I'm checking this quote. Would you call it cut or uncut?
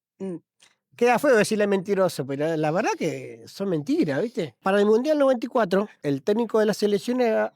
cut